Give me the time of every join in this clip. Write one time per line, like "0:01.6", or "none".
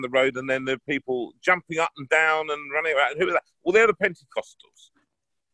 none